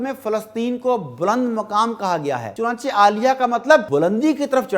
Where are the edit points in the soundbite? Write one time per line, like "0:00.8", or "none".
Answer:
0:02.5
0:03.9